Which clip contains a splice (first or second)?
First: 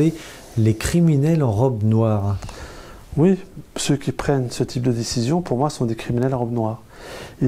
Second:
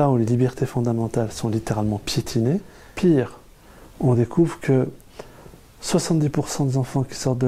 second